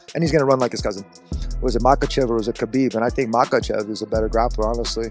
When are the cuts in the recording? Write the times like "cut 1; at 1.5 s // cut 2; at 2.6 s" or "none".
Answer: cut 1; at 1.1 s